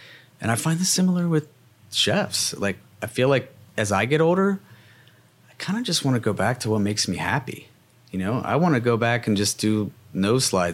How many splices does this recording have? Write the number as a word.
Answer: zero